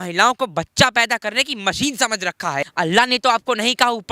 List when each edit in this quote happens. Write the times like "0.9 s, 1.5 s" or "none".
2.7 s